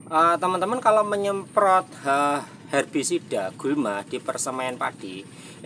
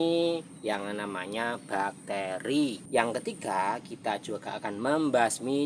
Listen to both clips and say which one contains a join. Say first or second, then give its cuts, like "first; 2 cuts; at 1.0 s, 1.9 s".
second; 1 cut; at 2.8 s